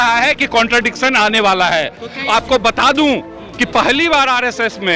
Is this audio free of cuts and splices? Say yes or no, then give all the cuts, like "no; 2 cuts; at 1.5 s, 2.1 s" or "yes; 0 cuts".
yes; 0 cuts